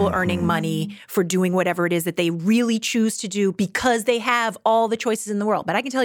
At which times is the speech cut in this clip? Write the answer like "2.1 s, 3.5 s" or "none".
none